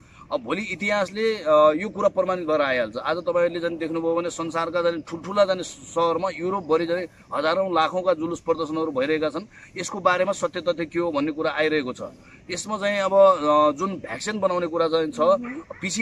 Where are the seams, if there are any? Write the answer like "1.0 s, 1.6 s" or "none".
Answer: none